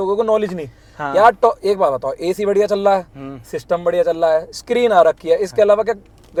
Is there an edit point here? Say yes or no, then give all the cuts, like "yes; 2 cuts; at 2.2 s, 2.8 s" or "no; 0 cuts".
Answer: no; 0 cuts